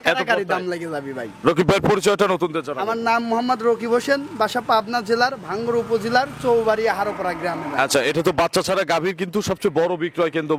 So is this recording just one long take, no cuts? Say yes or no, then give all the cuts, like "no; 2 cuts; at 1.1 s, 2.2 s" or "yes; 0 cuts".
yes; 0 cuts